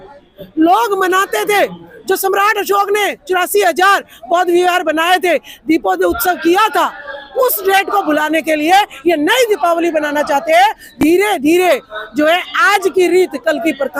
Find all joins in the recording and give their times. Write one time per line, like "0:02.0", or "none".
none